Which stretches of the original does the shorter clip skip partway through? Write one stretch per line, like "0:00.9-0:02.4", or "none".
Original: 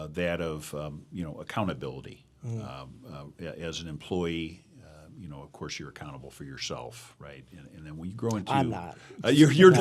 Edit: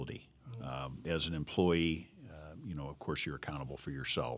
0:03.0-0:03.6